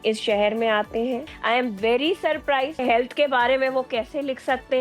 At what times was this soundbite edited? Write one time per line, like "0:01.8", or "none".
0:01.3
0:02.8